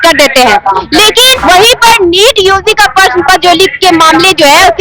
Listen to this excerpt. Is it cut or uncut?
cut